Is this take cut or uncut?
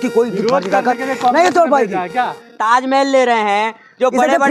cut